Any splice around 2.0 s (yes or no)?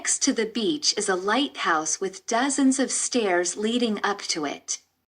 no